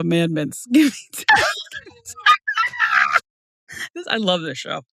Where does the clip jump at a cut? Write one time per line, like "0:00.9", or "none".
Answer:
none